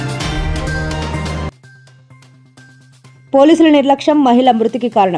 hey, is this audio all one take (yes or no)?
yes